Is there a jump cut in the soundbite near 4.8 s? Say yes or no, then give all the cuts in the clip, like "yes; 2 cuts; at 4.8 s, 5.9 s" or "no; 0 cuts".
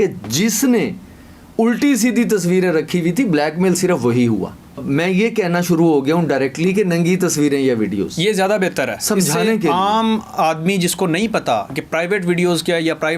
yes; 1 cut; at 4.8 s